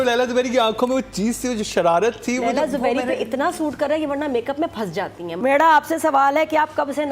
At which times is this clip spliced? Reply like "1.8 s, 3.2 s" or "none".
5.3 s